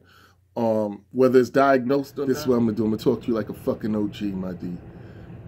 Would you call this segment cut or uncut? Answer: cut